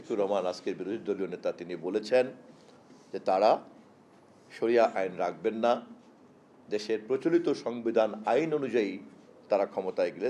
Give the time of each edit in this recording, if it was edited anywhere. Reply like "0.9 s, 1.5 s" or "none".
none